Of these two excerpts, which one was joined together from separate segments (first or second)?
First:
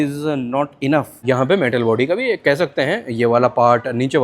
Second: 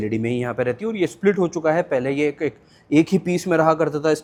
first